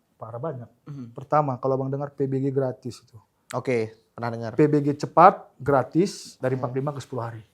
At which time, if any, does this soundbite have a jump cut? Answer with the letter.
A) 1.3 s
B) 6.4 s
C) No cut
B